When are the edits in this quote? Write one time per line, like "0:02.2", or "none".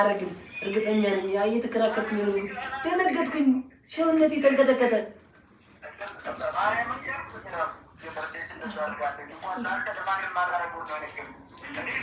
none